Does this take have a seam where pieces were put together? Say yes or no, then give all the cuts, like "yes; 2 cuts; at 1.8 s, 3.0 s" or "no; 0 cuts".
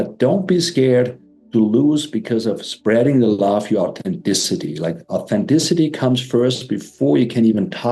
no; 0 cuts